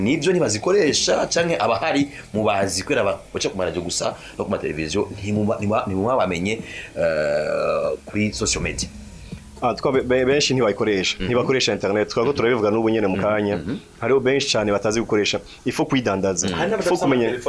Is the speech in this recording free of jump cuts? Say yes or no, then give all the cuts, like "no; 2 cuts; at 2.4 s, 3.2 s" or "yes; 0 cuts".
yes; 0 cuts